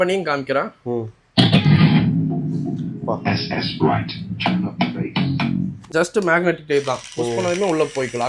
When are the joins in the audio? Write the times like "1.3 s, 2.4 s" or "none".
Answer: 5.8 s